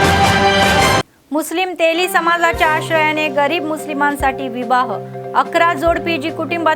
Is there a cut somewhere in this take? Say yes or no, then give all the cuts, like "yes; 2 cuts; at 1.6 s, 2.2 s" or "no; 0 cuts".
yes; 1 cut; at 1.0 s